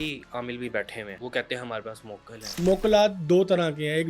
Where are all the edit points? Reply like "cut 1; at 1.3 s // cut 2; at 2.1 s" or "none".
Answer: cut 1; at 1.1 s // cut 2; at 2.6 s